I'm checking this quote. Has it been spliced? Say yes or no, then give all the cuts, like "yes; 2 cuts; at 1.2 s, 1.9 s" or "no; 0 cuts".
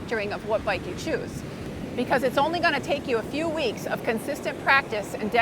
yes; 1 cut; at 1.7 s